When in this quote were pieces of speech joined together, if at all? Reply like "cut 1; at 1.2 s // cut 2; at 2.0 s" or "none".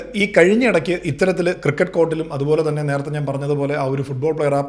none